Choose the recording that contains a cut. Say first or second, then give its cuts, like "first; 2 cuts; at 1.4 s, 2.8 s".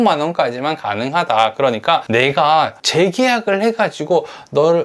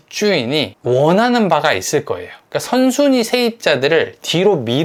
first; 1 cut; at 2.0 s